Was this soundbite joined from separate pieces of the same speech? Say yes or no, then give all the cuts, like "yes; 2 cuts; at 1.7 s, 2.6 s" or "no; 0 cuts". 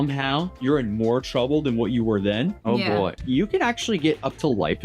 yes; 1 cut; at 3.2 s